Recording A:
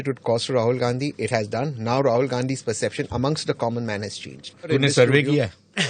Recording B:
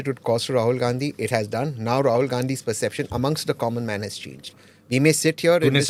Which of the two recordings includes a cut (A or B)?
A